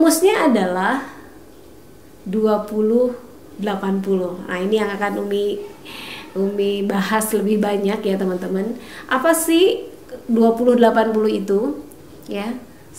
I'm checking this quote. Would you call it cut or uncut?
uncut